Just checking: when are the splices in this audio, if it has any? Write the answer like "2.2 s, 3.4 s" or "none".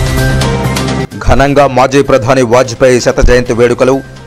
1.1 s